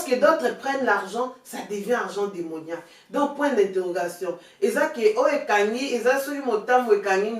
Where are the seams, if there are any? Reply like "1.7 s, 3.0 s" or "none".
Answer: none